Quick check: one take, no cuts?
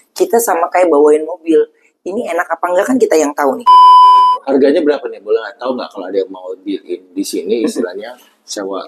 no; 2 cuts; at 3.6 s, 4.4 s

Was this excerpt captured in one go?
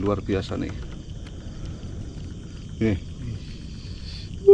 yes; 0 cuts

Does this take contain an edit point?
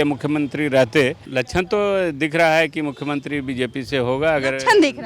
yes; 1 cut; at 1.2 s

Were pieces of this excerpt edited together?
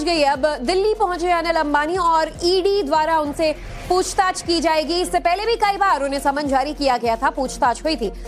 no; 0 cuts

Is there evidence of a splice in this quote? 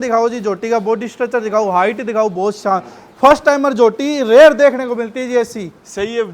no; 0 cuts

